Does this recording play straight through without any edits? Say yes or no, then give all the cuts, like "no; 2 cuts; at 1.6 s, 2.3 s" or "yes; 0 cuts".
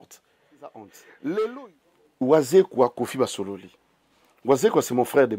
no; 1 cut; at 1.6 s